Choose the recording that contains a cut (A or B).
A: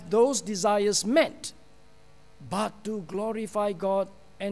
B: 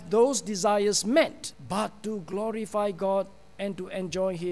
B